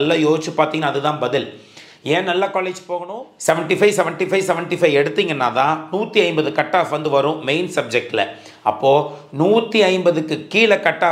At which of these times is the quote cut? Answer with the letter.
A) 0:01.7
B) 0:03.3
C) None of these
B